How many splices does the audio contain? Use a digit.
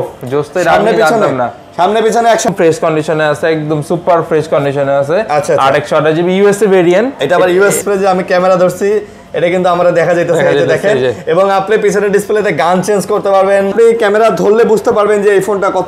3